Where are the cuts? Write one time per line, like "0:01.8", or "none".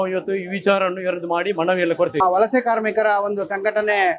none